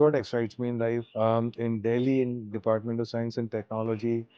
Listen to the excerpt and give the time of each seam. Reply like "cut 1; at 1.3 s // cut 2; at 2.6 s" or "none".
cut 1; at 1.1 s